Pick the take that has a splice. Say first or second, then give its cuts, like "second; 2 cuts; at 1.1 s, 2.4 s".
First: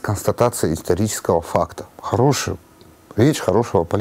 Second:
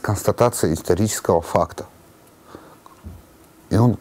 first; 1 cut; at 1.9 s